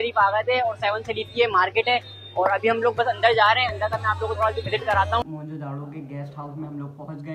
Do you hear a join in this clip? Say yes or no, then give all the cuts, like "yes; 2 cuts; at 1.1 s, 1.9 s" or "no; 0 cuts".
yes; 1 cut; at 5.2 s